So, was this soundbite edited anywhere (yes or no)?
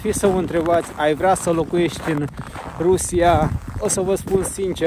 no